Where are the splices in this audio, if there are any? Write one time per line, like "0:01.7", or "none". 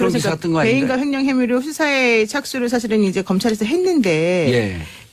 0:03.9